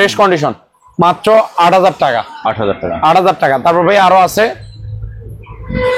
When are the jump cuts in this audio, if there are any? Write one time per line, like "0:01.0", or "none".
none